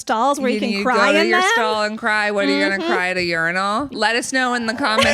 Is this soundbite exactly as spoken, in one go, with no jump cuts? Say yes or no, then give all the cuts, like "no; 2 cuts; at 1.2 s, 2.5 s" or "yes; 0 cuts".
no; 1 cut; at 3.9 s